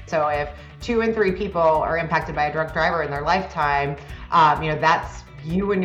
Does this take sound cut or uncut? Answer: uncut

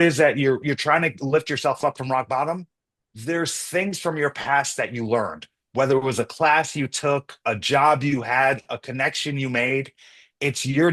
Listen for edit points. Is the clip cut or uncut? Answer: uncut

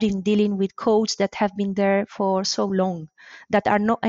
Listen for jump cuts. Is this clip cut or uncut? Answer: uncut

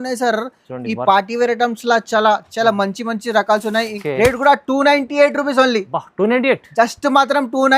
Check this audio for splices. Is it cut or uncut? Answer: cut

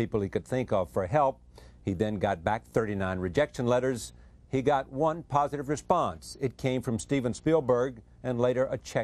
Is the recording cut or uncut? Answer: uncut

